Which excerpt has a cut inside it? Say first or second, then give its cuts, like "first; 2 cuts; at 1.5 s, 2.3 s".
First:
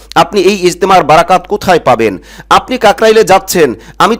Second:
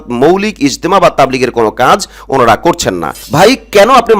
second; 1 cut; at 3.2 s